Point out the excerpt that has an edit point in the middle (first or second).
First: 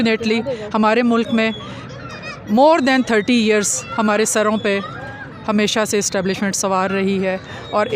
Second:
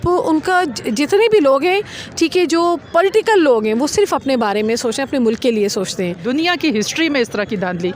second